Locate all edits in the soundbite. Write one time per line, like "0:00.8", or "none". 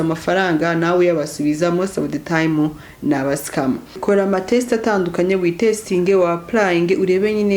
0:03.9